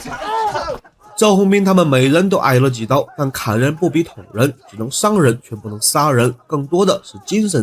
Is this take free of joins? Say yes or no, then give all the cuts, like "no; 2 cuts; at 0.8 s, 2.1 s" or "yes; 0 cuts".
yes; 0 cuts